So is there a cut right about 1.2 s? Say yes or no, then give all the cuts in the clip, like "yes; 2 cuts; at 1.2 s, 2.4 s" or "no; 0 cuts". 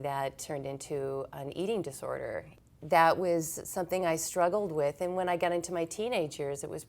no; 1 cut; at 2.5 s